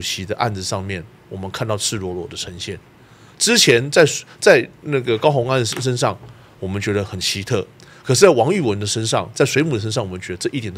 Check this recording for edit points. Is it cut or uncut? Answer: uncut